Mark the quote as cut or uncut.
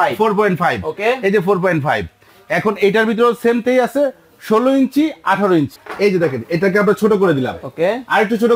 cut